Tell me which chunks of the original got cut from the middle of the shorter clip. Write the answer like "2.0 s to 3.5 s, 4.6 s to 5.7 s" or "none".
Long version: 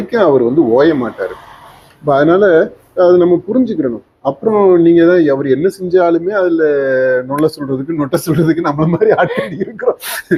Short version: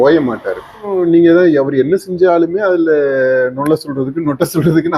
1.7 s to 4.6 s